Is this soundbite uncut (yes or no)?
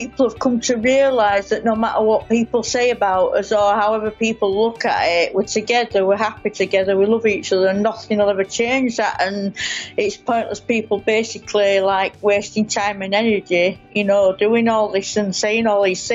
yes